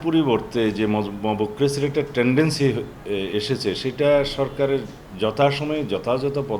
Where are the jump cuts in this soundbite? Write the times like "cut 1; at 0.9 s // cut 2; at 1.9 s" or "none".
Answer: none